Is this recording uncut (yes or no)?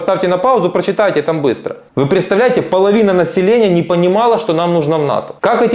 no